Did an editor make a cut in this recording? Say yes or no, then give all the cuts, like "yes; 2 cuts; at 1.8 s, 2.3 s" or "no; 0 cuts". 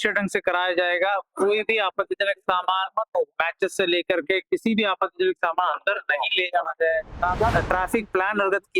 yes; 1 cut; at 7.5 s